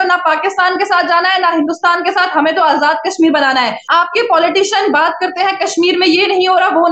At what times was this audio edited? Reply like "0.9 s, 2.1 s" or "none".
3.8 s